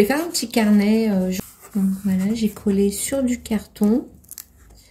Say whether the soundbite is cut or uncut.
cut